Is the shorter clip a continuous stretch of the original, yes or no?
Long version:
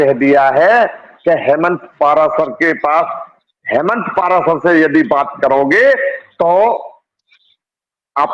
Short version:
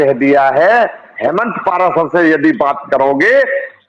no